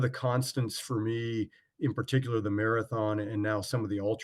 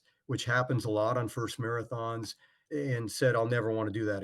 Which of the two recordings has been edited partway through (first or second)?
second